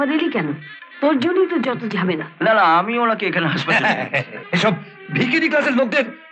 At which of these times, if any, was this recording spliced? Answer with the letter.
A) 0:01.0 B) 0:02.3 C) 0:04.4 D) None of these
C